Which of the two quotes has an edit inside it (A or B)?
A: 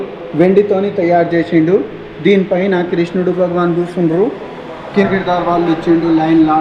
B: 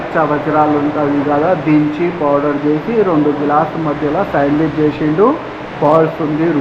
A